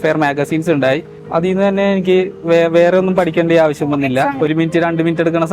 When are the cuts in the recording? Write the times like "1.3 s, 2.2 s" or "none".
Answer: 1.2 s, 4.3 s